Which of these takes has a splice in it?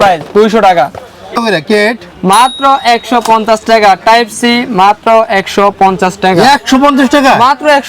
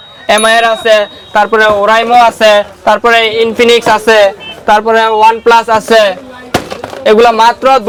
first; 1 cut; at 1.3 s

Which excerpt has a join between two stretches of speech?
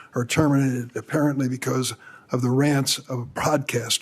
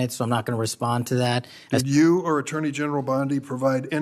second; 1 cut; at 1.6 s

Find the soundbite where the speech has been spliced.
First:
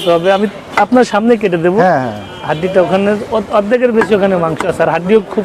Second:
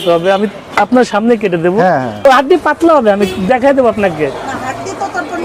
second; 1 cut; at 2.2 s

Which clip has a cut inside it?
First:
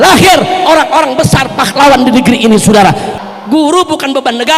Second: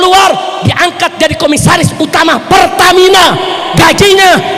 first; 1 cut; at 3.1 s

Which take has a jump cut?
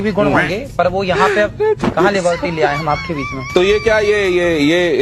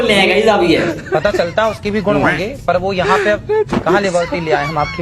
second; 1 cut; at 0.9 s

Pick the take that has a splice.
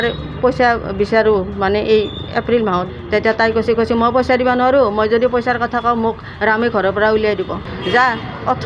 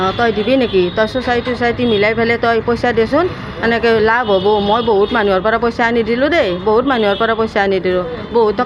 first; 2 cuts; at 2.9 s, 7.7 s

